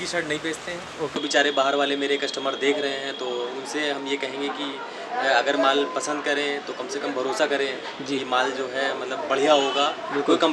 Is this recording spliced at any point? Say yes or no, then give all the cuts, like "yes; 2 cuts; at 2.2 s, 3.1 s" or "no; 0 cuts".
yes; 1 cut; at 1.1 s